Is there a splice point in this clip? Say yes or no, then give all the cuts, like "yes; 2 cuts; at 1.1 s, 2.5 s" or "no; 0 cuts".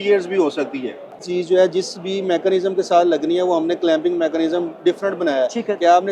yes; 1 cut; at 1.3 s